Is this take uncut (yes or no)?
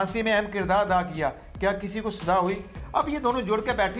no